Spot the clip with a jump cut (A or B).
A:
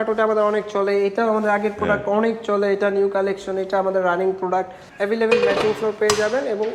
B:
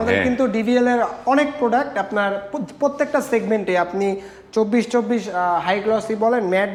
A